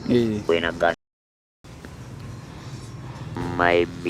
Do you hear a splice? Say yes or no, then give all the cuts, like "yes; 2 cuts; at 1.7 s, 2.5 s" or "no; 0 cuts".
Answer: yes; 1 cut; at 1.3 s